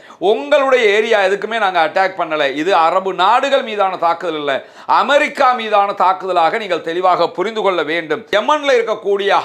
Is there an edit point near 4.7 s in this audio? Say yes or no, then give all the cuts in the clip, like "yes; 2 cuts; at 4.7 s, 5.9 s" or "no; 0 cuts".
no; 1 cut; at 8.2 s